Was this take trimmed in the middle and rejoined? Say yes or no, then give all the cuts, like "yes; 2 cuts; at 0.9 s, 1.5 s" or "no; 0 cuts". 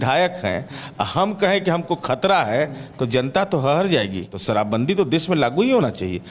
yes; 1 cut; at 4.3 s